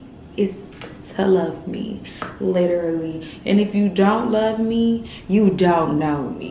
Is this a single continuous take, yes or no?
yes